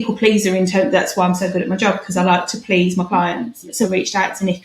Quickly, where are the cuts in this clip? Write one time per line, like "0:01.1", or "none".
0:03.7